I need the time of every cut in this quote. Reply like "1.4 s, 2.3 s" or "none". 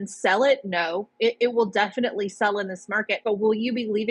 none